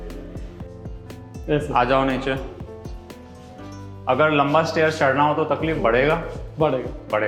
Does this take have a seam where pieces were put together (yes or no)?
no